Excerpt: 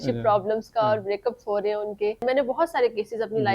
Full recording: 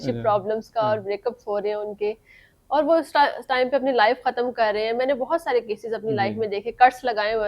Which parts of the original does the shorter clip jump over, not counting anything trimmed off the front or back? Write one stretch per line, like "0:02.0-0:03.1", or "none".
0:02.2-0:04.9